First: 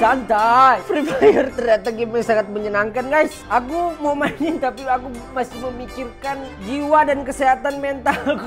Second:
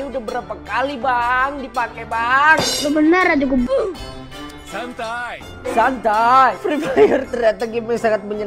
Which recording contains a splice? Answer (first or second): second